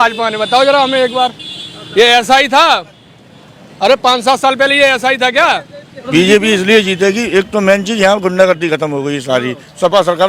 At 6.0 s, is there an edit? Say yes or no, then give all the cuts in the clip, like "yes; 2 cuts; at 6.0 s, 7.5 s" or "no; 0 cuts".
yes; 1 cut; at 6.0 s